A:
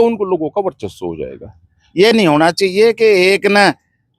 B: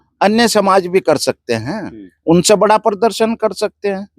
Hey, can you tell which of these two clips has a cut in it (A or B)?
A